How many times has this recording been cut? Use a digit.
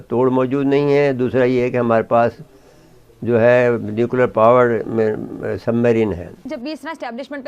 1